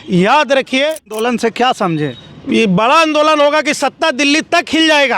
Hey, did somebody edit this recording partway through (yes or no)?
yes